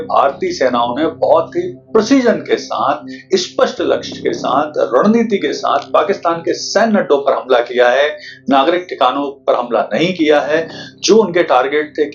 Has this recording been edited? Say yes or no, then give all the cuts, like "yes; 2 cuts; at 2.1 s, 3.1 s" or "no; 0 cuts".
no; 0 cuts